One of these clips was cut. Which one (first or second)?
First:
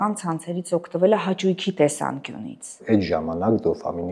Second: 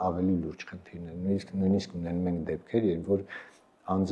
first